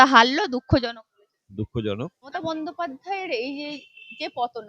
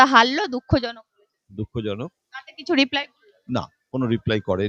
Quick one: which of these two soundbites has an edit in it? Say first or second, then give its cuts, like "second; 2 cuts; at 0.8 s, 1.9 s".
first; 1 cut; at 2.3 s